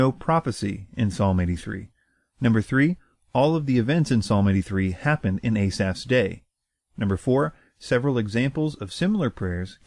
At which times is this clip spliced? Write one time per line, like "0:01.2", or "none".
0:08.8